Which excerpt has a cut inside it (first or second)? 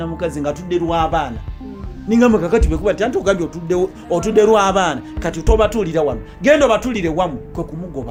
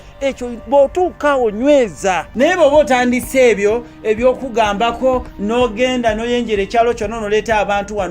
second